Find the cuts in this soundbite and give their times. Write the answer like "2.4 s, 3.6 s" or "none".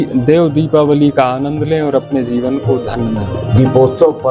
3.4 s